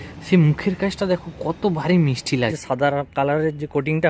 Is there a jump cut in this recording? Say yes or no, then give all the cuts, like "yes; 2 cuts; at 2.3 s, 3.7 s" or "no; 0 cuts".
yes; 1 cut; at 2.6 s